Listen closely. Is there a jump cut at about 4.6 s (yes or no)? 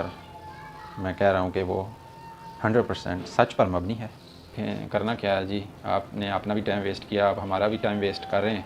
yes